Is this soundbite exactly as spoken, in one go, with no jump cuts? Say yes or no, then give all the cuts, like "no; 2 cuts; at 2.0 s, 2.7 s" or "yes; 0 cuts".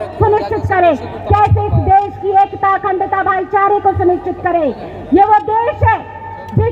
yes; 0 cuts